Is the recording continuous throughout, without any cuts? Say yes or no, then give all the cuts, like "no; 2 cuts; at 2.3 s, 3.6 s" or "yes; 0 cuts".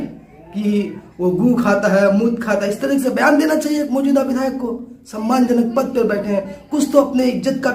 yes; 0 cuts